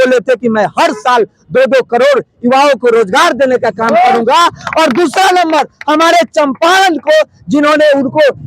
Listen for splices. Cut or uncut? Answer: uncut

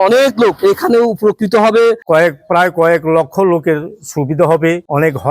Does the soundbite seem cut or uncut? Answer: cut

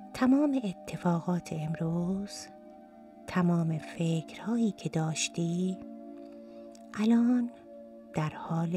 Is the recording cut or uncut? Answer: uncut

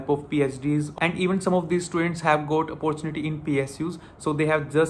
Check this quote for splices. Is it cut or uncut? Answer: cut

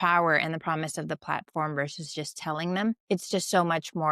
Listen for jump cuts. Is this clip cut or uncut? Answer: cut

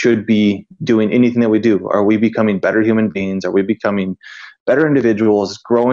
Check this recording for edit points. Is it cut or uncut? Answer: uncut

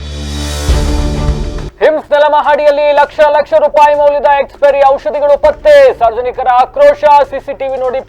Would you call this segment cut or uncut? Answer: cut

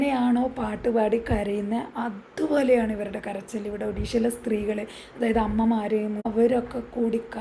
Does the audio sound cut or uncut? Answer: cut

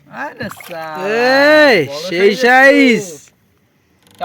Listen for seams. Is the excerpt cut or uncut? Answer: uncut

